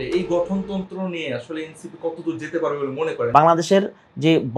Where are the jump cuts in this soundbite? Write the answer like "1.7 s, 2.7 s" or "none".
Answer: 3.4 s

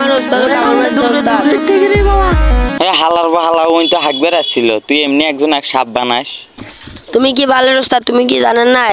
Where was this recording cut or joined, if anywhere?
2.7 s

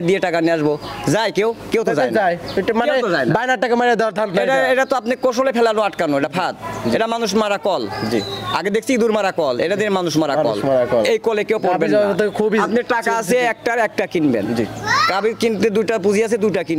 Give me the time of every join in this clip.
none

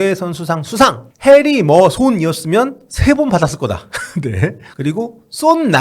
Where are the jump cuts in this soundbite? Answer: 1.1 s, 4.6 s

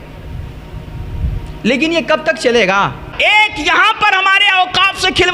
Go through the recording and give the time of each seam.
3.1 s

